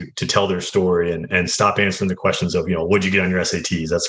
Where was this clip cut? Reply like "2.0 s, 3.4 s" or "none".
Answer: 1.3 s